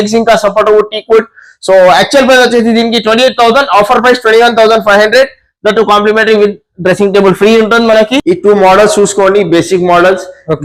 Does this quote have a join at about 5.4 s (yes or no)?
no